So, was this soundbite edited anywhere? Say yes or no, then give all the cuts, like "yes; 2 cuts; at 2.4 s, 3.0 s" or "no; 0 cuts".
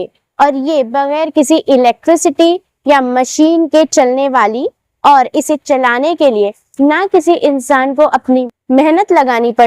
yes; 1 cut; at 8.2 s